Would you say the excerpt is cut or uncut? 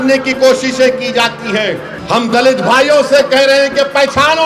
cut